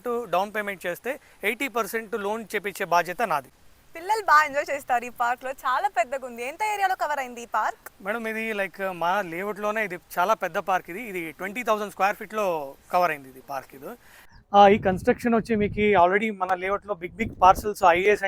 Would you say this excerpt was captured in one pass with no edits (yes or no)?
no